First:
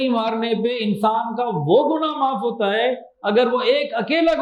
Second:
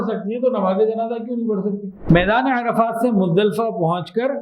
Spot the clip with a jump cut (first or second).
second